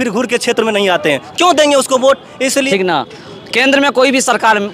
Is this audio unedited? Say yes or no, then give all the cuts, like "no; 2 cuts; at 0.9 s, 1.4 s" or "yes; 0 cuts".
no; 1 cut; at 2.7 s